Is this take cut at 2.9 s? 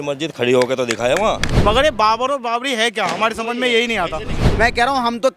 no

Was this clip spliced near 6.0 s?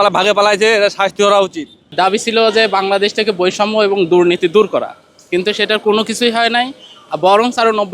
no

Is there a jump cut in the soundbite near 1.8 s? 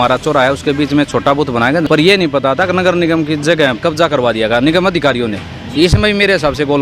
yes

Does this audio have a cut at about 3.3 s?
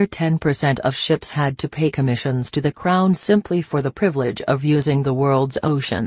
no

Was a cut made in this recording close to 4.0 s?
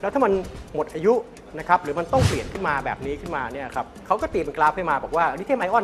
yes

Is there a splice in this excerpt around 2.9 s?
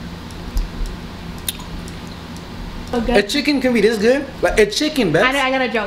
yes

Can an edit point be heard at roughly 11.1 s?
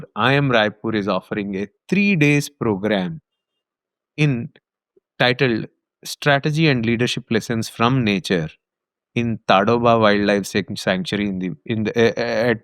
no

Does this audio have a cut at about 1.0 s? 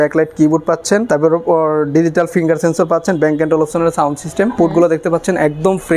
yes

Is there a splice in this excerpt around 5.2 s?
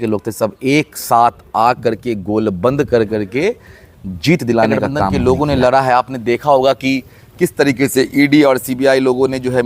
yes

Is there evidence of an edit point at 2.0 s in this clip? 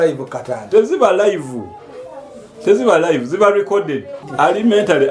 no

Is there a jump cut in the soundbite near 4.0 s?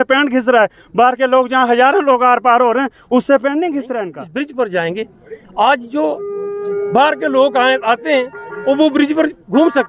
yes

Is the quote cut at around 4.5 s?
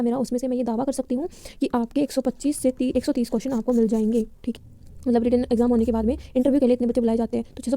yes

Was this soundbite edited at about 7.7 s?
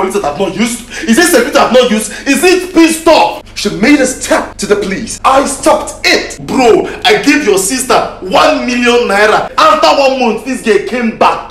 no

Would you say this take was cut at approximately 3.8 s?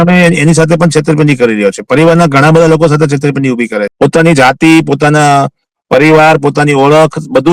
yes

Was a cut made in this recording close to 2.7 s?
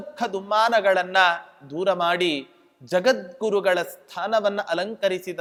no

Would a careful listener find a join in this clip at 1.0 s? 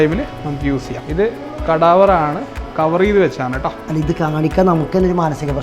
yes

